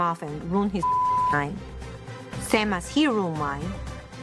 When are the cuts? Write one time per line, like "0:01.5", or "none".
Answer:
none